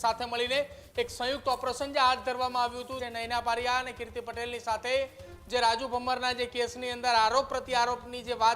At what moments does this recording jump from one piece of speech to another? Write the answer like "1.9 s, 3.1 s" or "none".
3.0 s